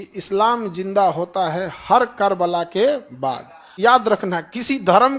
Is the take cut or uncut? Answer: cut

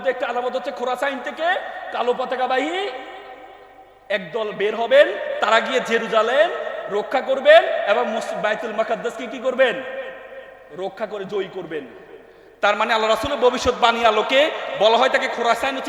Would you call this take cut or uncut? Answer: uncut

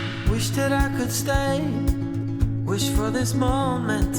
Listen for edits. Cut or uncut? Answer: uncut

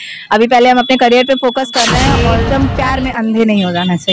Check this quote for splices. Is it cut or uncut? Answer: cut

